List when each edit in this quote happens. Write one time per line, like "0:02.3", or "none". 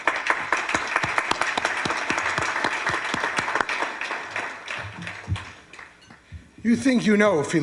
none

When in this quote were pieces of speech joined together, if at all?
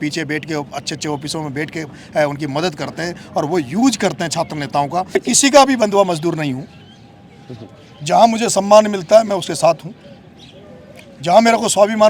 0:05.2

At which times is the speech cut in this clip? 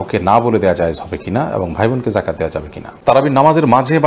0:02.9

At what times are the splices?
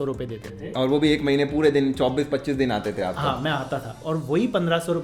none

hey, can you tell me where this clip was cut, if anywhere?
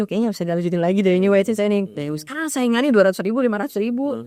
none

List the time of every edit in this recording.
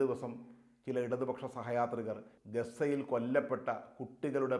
0:02.3

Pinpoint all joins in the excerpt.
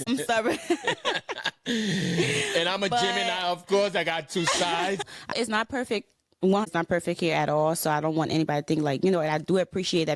0:05.3

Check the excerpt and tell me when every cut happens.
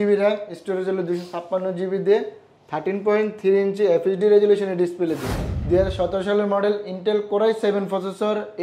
0:05.5

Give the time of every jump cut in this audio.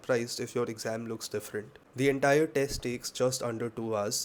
none

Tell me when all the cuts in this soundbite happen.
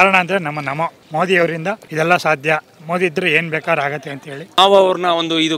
0:01.0
0:01.8
0:04.6

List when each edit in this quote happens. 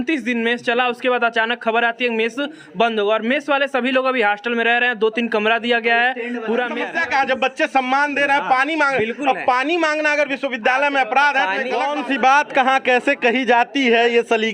0:06.8
0:11.9

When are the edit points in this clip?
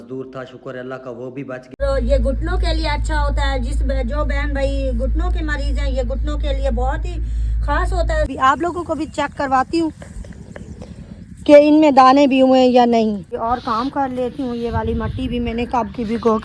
0:01.8
0:08.3
0:13.3

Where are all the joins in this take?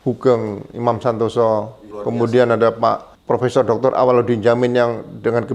0:01.9
0:03.1

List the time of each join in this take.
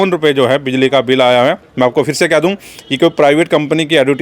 none

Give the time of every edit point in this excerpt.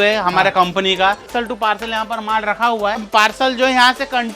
0:01.3
0:03.1

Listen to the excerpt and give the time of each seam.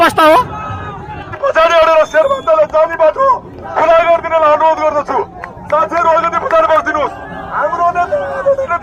0:01.3

